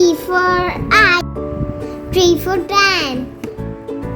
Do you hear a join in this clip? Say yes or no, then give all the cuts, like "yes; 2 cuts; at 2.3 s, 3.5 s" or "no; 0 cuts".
yes; 1 cut; at 3.3 s